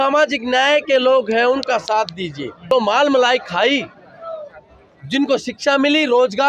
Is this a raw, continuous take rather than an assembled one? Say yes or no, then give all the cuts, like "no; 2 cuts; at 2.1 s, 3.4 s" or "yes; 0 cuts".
no; 1 cut; at 2.6 s